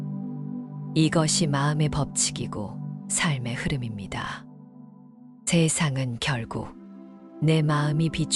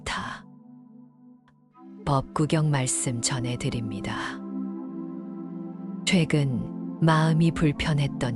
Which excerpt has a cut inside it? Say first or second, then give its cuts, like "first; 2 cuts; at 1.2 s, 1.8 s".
first; 1 cut; at 0.9 s